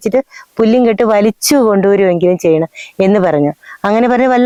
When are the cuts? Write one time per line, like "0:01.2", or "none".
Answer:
none

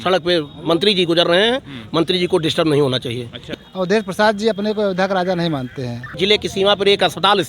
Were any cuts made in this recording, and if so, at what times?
0:03.4
0:06.2

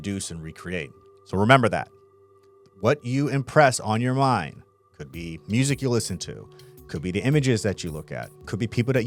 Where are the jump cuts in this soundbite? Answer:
none

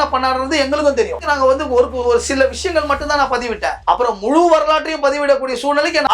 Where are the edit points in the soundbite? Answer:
0:01.2

